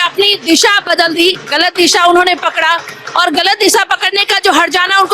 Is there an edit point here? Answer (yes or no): no